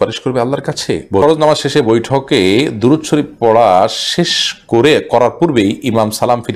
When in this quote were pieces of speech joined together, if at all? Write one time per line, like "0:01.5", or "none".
0:01.2